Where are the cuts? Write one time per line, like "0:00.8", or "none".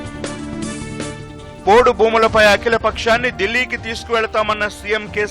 0:01.1